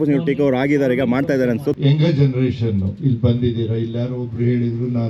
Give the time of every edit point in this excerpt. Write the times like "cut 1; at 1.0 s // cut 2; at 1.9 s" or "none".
cut 1; at 1.8 s